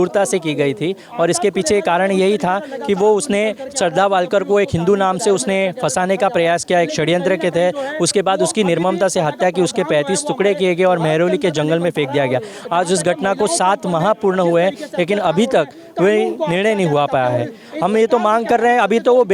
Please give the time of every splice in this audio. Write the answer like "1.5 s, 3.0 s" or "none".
none